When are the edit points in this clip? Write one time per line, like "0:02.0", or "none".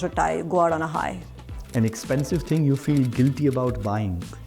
none